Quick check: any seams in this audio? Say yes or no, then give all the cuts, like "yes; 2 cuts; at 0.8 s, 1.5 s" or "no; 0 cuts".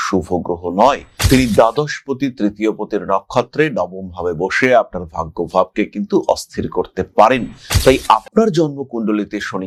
no; 0 cuts